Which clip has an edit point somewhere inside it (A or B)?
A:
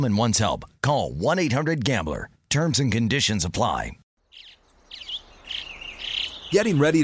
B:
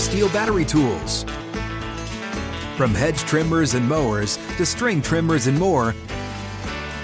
A